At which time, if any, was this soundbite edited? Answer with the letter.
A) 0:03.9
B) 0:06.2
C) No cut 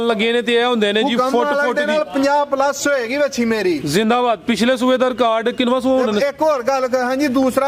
C